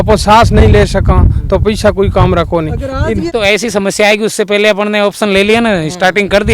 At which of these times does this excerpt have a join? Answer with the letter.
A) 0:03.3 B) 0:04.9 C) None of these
A